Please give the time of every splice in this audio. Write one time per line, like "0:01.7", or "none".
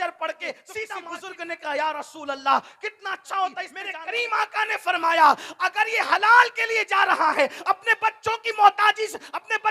0:00.9
0:03.8